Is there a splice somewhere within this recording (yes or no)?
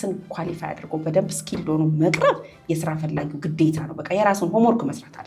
no